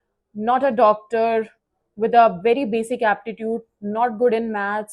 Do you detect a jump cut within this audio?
no; 0 cuts

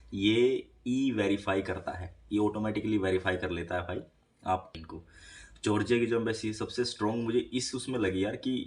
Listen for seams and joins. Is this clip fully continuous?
no; 1 cut; at 4.7 s

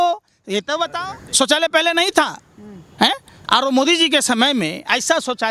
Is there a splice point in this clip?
yes; 1 cut; at 0.9 s

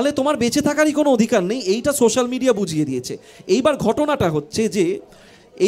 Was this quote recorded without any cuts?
yes; 0 cuts

